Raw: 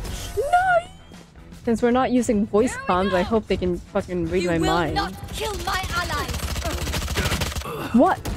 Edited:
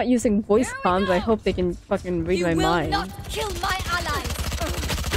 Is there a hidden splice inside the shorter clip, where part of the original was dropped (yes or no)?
no